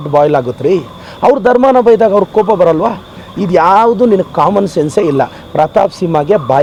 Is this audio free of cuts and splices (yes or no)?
yes